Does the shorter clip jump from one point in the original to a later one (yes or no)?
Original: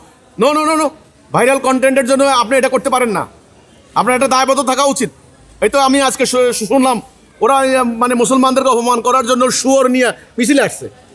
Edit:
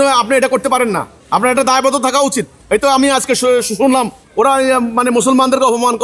yes